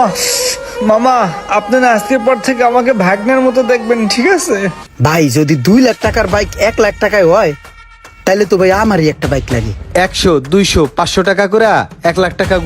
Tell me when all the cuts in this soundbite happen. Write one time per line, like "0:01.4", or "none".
0:04.8
0:09.8